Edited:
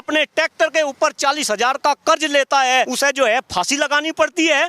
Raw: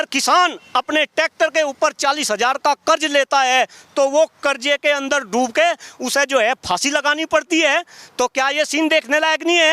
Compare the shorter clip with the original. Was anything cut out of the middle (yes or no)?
yes